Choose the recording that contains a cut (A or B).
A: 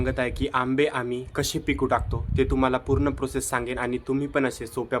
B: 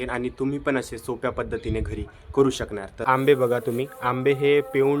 B